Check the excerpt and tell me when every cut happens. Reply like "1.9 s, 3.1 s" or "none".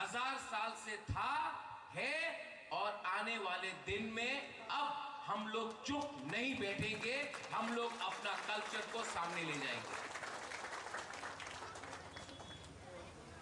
6.3 s